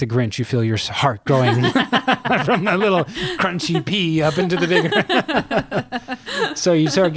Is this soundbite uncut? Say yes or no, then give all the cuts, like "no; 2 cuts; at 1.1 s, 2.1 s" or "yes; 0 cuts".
yes; 0 cuts